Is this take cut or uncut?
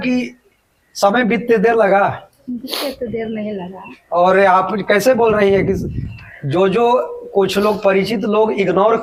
uncut